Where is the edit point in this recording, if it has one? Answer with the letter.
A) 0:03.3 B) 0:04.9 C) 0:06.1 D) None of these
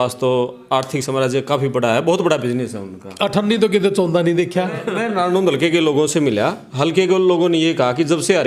B